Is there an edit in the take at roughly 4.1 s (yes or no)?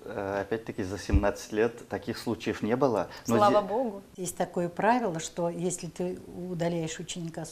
yes